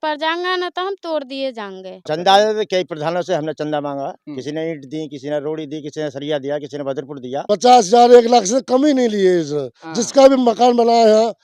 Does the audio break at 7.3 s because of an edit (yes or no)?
yes